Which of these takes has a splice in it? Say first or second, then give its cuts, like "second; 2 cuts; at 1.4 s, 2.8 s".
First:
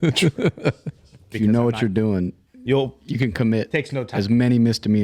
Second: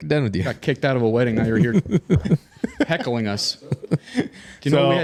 first; 1 cut; at 1.3 s